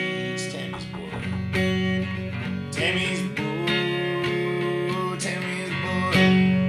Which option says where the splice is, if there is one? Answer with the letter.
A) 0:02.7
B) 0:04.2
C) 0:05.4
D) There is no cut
A